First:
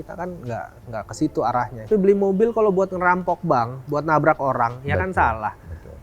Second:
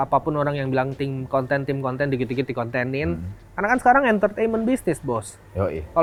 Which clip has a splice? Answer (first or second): first